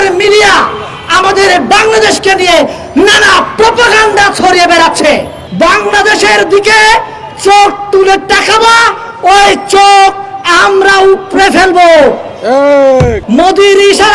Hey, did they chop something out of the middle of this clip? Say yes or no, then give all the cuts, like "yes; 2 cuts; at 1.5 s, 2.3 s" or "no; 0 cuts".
yes; 2 cuts; at 5.4 s, 13.2 s